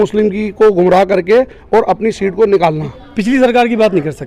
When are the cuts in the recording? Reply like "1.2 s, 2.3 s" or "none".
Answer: 3.0 s